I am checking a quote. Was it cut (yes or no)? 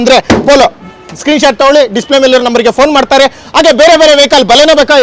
no